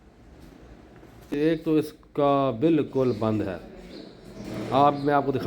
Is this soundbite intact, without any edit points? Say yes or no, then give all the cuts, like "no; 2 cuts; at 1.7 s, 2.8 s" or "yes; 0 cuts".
no; 1 cut; at 1.3 s